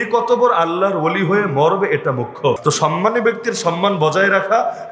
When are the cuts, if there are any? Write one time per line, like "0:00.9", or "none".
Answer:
0:02.6